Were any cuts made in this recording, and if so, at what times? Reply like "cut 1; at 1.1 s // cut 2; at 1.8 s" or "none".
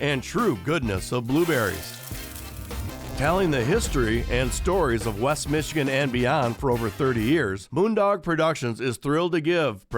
cut 1; at 7.6 s